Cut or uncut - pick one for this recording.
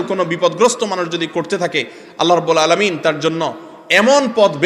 uncut